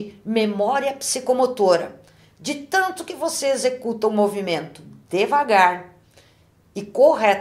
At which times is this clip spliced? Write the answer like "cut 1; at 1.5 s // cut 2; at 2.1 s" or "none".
none